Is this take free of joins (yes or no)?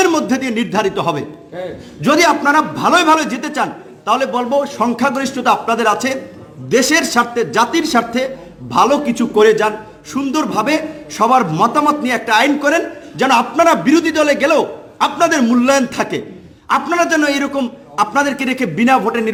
yes